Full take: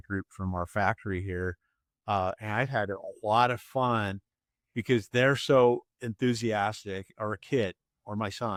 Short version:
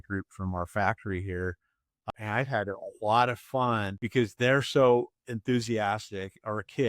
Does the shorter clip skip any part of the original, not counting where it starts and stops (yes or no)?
yes